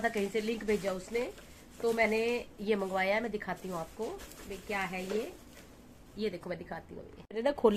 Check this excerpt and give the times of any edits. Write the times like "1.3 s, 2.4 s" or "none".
none